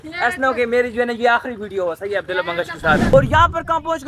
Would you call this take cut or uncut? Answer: cut